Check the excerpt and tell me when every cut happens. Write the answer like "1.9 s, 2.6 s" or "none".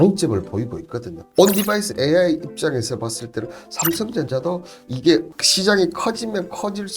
1.2 s